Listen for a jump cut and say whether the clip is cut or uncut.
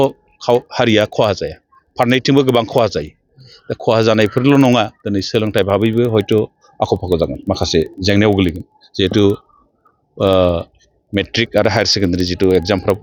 uncut